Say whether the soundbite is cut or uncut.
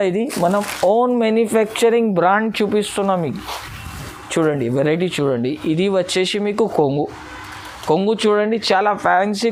uncut